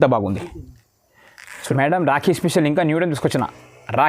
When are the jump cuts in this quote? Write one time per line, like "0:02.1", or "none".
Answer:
0:01.7